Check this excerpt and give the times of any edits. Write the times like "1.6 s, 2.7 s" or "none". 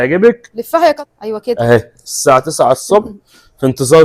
1.0 s